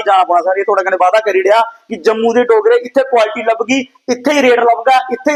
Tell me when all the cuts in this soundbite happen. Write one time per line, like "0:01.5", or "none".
none

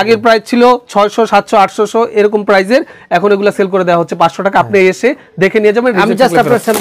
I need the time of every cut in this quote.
none

